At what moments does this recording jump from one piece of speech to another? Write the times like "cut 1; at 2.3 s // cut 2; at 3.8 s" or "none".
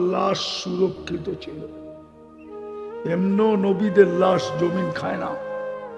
none